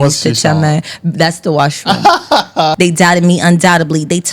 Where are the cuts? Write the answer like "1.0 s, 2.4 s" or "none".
2.8 s

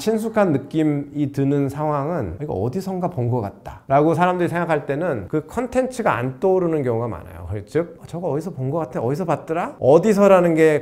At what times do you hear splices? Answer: none

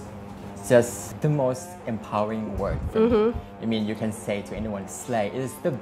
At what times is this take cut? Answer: 1.0 s

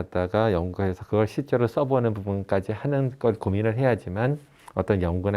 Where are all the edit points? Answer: none

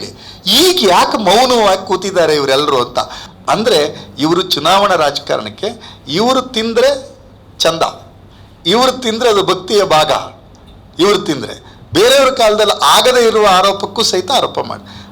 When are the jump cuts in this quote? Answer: 3.2 s

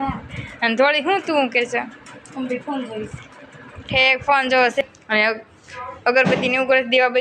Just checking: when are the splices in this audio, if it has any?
4.8 s

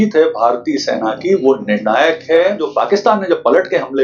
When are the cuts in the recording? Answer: 2.6 s

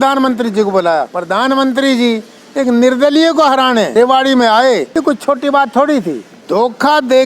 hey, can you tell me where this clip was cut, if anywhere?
1.2 s, 3.9 s, 4.9 s, 6.3 s

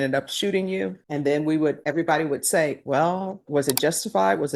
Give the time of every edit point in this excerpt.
1.0 s, 1.8 s

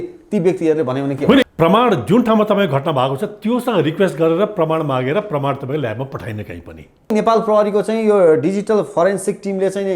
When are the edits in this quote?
1.4 s, 7.1 s

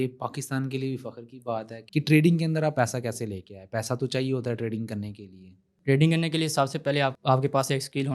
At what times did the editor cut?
1.8 s, 7.2 s

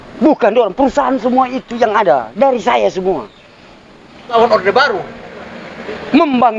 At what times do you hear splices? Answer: 4.3 s

